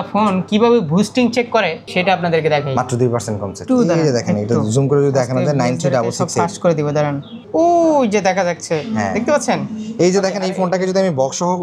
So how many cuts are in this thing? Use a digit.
3